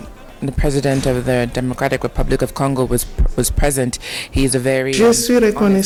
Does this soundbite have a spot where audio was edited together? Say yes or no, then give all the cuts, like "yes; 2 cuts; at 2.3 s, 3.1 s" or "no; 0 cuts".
no; 0 cuts